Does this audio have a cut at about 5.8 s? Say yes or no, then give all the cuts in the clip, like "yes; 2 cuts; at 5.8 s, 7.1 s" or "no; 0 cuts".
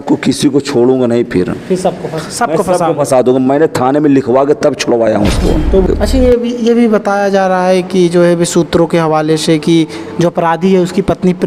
yes; 1 cut; at 5.8 s